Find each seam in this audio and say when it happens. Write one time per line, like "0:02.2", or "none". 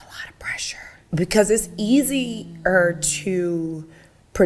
0:01.0